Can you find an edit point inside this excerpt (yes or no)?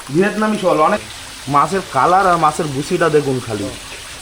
yes